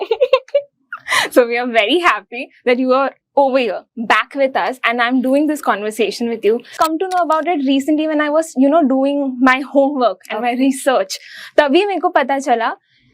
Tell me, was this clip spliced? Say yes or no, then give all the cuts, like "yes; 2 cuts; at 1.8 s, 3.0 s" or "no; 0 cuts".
yes; 1 cut; at 6.7 s